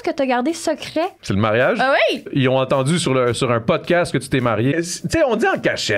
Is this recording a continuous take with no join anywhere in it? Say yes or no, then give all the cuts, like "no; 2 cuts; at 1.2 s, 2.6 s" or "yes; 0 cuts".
no; 3 cuts; at 1.2 s, 2.3 s, 4.7 s